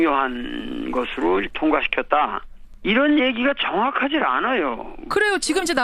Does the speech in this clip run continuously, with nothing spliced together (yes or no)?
no